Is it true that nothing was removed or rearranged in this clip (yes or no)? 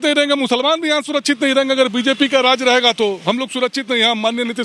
yes